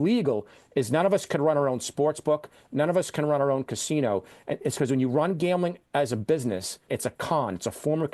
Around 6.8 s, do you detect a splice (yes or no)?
yes